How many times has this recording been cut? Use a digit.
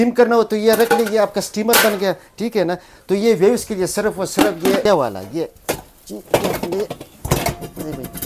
1